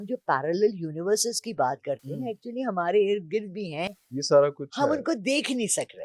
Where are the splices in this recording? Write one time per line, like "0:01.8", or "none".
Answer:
none